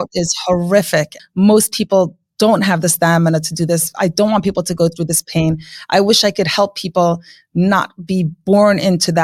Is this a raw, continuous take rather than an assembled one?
no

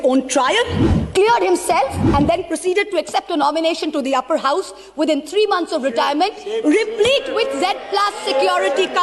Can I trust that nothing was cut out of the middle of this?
yes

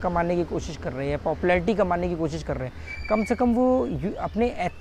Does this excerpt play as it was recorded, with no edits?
yes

